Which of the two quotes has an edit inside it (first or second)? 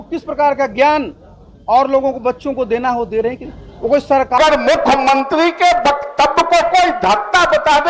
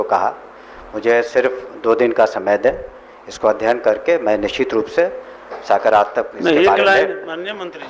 first